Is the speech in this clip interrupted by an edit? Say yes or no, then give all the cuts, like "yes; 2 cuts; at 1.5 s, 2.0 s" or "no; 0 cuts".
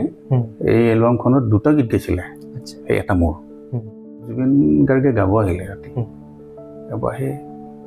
yes; 1 cut; at 4.3 s